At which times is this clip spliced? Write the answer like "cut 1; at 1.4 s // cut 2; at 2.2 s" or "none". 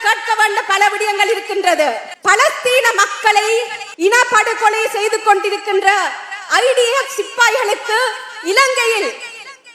cut 1; at 2.1 s // cut 2; at 3.8 s

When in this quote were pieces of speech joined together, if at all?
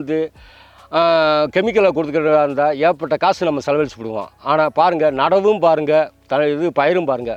none

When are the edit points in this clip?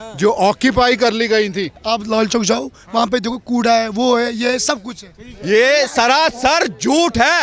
cut 1; at 1.8 s

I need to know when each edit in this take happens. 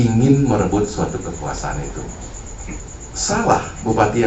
cut 1; at 2.9 s

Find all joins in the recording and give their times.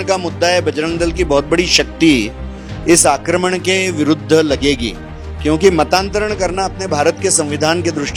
none

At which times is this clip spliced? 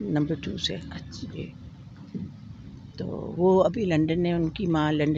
none

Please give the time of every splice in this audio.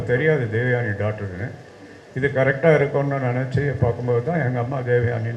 none

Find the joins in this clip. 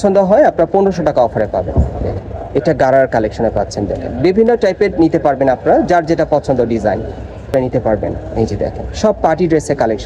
cut 1; at 7.5 s

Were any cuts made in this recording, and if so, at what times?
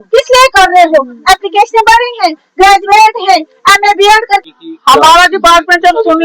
cut 1; at 4.4 s

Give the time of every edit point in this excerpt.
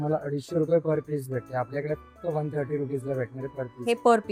none

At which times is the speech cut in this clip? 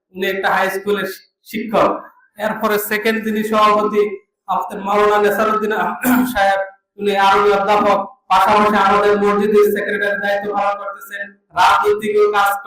none

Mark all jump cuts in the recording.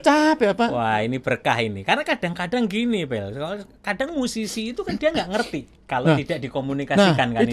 none

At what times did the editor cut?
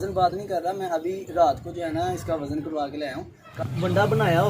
cut 1; at 3.5 s

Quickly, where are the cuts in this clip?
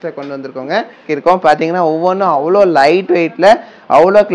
cut 1; at 1.1 s

